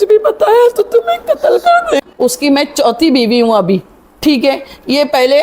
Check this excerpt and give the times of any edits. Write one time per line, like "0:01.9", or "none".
0:02.0